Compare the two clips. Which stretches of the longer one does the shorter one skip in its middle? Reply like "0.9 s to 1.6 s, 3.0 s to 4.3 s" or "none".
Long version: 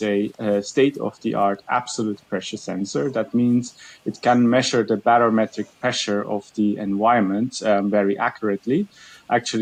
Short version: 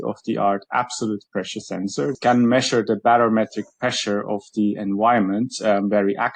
3.1 s to 4.2 s